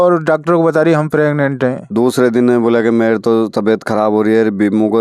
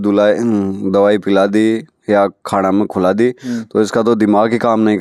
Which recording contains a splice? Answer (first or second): first